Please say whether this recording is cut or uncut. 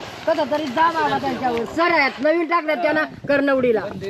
uncut